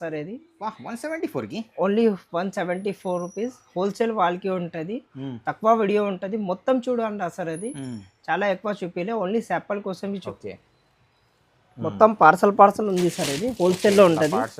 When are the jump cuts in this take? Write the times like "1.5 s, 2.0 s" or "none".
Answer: 10.3 s